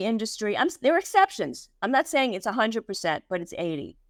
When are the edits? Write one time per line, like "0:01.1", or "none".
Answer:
none